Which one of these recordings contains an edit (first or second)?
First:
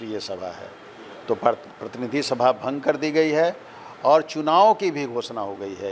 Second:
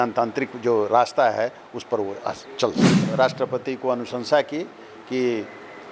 second